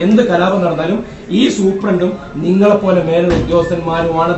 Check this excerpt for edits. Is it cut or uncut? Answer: uncut